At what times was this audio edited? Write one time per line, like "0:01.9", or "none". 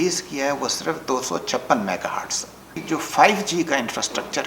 0:02.7